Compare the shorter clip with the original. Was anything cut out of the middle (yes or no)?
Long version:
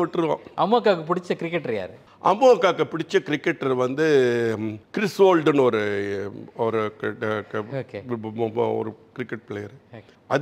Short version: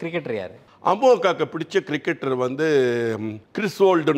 no